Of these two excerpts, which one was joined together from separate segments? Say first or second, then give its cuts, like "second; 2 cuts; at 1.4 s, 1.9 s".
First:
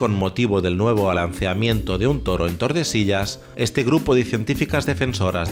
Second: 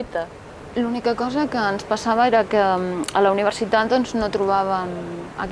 second; 1 cut; at 3.0 s